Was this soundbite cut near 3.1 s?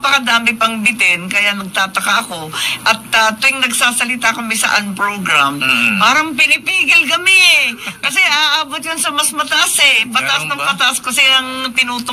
no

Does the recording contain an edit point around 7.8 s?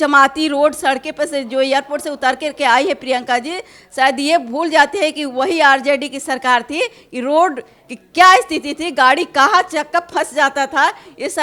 no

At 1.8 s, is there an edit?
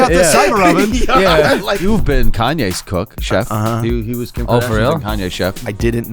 yes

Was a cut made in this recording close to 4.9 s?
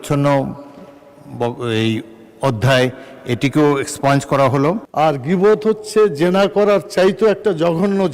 yes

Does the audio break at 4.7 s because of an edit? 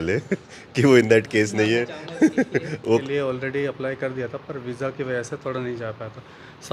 no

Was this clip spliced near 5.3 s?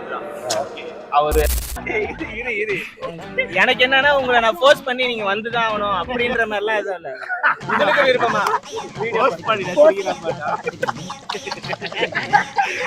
no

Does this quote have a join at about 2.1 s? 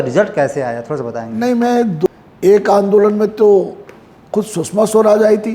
yes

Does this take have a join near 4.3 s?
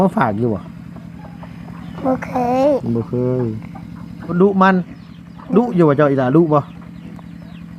yes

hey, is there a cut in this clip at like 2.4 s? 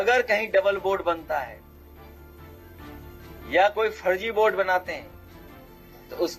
no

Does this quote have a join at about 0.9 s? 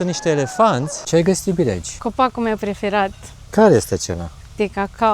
yes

